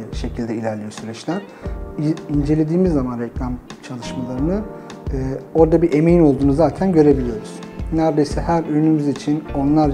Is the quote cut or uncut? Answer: uncut